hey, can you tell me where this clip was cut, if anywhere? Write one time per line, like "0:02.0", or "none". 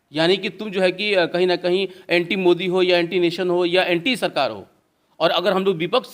none